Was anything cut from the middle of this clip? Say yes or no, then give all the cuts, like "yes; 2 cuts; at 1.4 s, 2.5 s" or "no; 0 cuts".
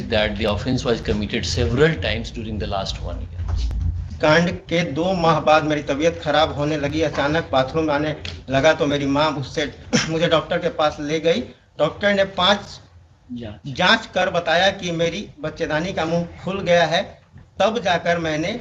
yes; 1 cut; at 4.0 s